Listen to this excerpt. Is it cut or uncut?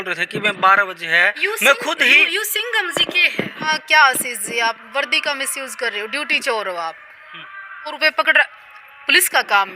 cut